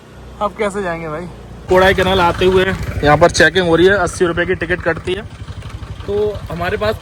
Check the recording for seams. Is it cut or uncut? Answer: uncut